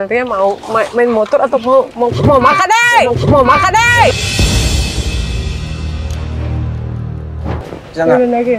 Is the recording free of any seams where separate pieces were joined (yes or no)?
no